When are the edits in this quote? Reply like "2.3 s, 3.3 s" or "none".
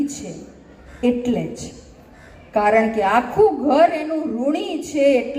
none